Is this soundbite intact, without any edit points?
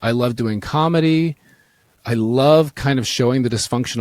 no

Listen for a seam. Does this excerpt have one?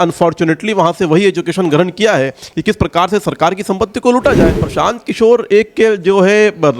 yes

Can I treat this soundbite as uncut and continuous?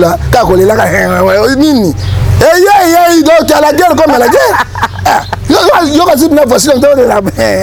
yes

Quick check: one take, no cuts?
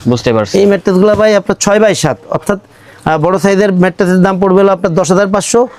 yes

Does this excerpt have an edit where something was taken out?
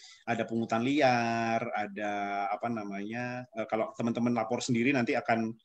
no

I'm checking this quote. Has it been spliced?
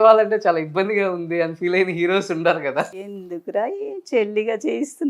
yes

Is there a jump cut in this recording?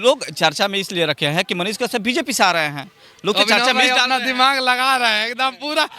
no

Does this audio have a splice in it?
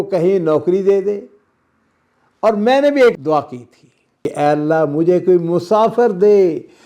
yes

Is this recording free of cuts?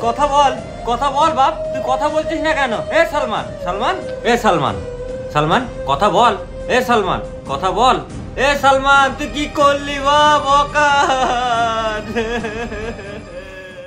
yes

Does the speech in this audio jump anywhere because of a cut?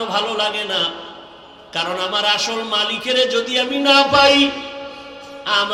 no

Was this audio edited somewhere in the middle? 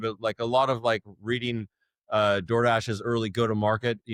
no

